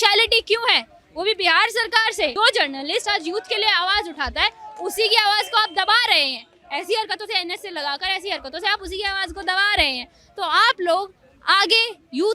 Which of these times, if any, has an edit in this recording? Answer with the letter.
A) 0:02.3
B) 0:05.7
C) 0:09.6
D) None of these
A